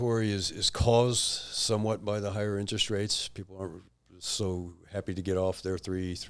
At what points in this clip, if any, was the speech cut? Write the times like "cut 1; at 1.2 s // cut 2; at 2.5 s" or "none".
none